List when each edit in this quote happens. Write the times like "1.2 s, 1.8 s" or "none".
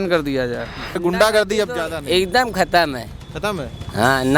1.0 s